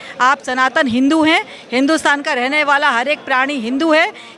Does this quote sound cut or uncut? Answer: uncut